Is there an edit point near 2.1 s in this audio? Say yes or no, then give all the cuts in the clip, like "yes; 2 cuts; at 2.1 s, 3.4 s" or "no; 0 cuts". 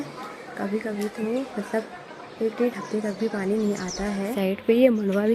no; 1 cut; at 4.3 s